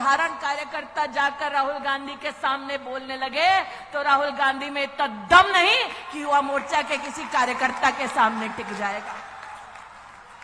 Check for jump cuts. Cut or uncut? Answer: uncut